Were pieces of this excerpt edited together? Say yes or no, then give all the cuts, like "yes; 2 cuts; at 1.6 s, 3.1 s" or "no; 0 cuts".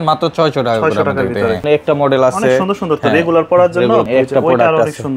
yes; 2 cuts; at 1.6 s, 4.1 s